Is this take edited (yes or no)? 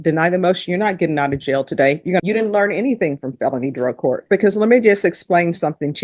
yes